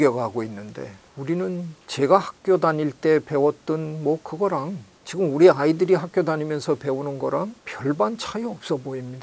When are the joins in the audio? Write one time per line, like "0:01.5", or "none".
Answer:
0:01.0
0:01.8